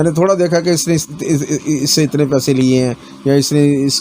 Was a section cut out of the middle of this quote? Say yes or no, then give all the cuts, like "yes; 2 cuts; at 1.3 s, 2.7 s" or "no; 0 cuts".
no; 0 cuts